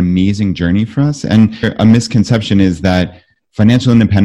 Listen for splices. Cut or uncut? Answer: cut